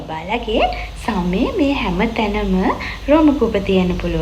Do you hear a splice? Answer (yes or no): no